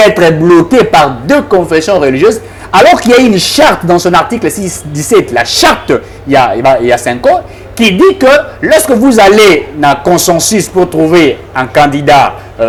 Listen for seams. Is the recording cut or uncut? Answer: uncut